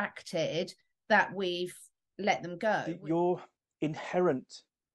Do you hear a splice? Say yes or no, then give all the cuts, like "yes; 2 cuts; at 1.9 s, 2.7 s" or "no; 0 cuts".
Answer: yes; 1 cut; at 2.9 s